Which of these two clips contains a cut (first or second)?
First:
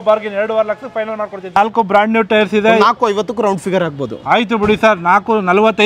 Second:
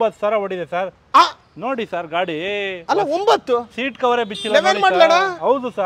first